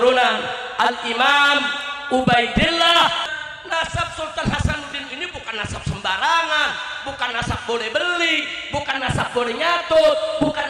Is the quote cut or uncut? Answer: cut